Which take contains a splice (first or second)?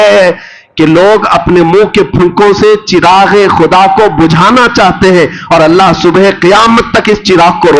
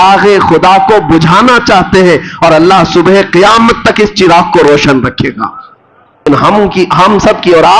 second